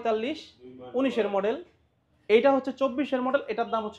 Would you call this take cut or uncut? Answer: uncut